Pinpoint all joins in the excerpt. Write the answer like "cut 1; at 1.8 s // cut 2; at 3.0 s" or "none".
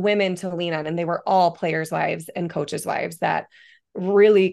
none